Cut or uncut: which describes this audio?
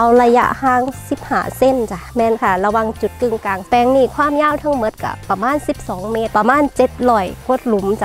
cut